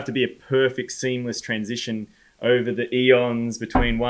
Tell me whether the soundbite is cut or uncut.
uncut